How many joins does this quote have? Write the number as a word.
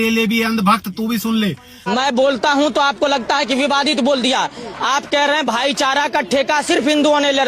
one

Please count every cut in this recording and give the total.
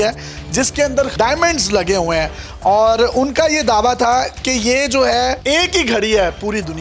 two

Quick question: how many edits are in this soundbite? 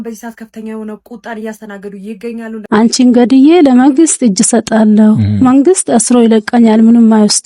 one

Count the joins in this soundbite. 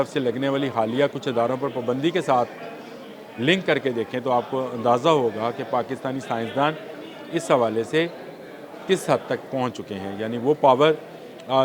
zero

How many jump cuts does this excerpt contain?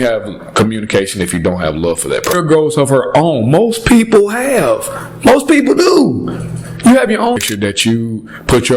two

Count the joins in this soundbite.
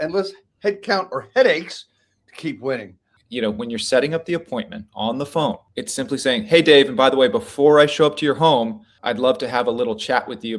three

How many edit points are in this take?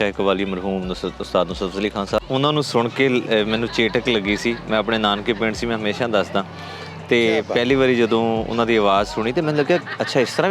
one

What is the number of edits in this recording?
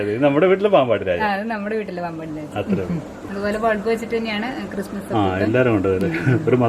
one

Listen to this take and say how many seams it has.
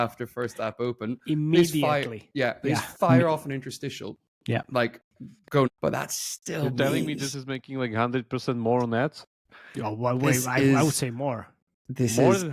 one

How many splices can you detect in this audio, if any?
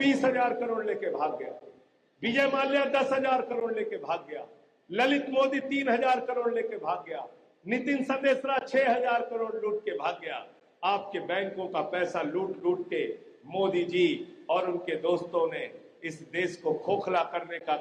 zero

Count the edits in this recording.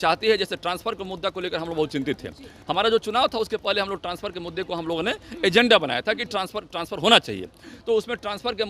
zero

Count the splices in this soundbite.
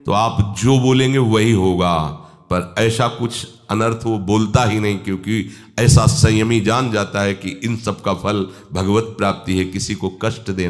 zero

